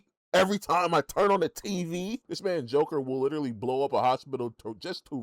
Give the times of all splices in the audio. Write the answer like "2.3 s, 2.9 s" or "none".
2.3 s